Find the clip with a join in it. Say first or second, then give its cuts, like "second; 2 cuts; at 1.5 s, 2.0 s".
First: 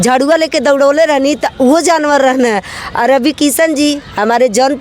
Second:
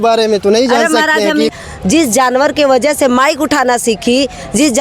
second; 1 cut; at 1.5 s